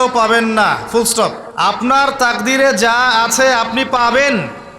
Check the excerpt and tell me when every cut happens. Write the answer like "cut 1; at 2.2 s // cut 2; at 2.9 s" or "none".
cut 1; at 1.8 s